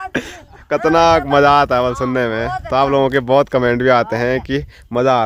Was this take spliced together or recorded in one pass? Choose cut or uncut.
uncut